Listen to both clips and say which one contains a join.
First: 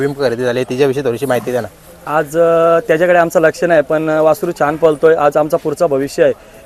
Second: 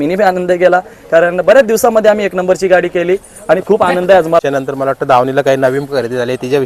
second; 1 cut; at 4.4 s

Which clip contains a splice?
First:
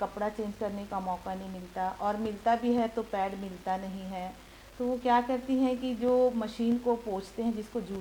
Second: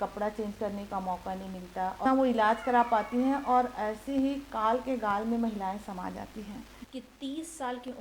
second; 2 cuts; at 2.1 s, 6.8 s

